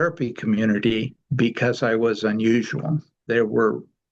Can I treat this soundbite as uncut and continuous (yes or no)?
no